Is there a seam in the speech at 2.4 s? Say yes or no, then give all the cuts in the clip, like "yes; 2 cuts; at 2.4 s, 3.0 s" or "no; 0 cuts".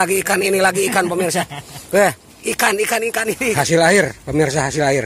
no; 1 cut; at 3.7 s